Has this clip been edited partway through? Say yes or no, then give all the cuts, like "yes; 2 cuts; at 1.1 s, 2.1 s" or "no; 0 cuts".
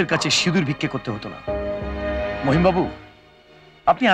no; 0 cuts